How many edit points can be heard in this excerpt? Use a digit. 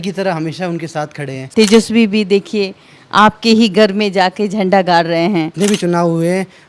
2